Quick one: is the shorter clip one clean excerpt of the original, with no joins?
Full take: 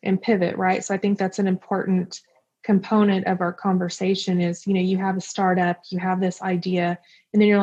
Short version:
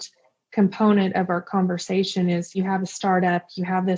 no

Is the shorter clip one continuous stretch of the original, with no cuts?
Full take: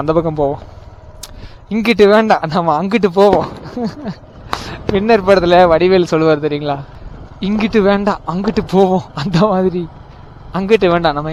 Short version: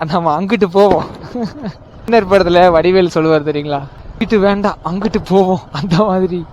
no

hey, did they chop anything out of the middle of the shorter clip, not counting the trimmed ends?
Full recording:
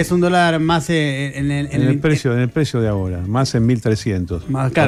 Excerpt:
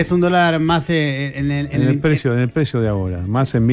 no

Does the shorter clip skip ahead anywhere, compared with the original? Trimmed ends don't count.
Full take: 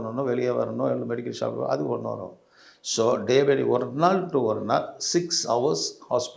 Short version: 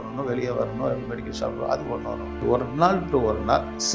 yes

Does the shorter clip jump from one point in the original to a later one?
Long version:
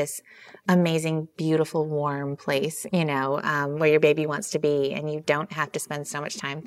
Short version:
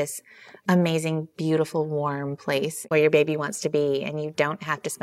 yes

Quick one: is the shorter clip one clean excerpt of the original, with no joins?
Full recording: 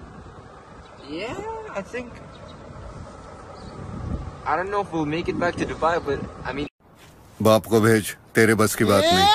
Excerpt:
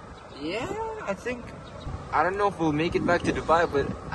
no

